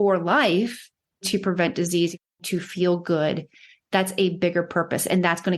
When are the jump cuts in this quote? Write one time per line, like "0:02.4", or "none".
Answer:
0:01.2
0:02.4